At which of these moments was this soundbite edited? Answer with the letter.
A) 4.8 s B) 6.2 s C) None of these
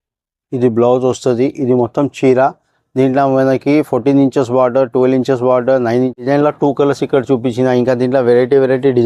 B